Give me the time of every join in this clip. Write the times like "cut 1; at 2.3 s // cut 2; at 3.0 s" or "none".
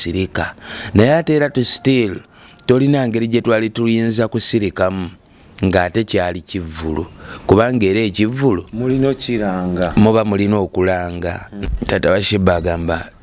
cut 1; at 11.6 s